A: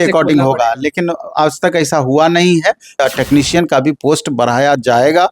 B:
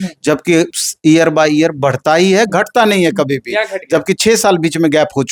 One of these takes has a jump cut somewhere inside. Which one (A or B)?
A